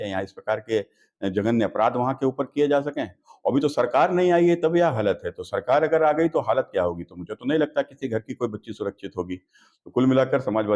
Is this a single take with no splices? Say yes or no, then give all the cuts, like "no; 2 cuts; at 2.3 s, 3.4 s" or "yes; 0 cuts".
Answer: yes; 0 cuts